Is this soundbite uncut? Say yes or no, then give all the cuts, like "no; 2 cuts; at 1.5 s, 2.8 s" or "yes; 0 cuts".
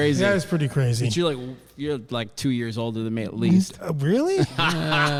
yes; 0 cuts